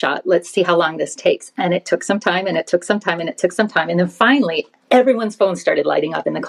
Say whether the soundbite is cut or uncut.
uncut